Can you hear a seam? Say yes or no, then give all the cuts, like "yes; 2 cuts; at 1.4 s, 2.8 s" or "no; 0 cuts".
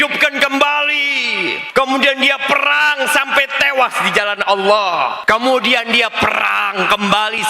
yes; 2 cuts; at 1.6 s, 5.2 s